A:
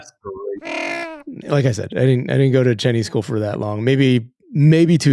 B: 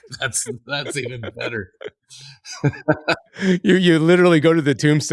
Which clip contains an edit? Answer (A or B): A